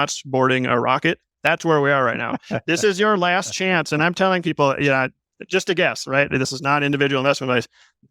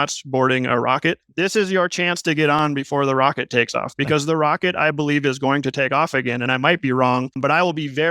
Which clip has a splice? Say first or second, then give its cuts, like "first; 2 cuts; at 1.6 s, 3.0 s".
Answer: second; 3 cuts; at 1.3 s, 6.4 s, 7.4 s